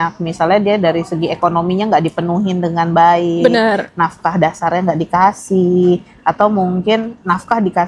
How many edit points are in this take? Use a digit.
0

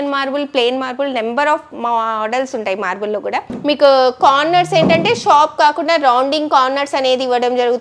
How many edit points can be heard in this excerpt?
1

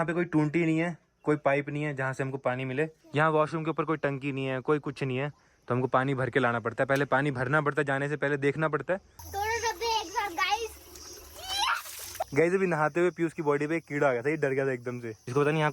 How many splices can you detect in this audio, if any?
3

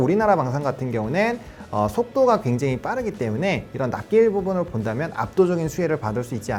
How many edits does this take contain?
0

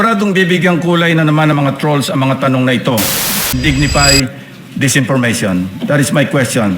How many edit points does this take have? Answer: 1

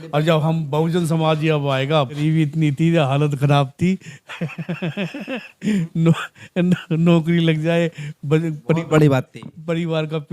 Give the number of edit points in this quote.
1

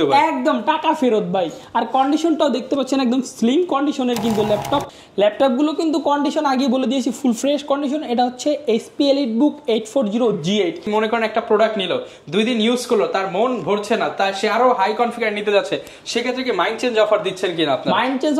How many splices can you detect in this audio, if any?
2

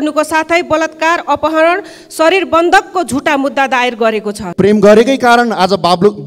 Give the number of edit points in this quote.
1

